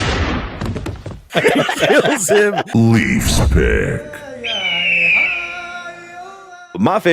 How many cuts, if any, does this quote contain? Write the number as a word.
two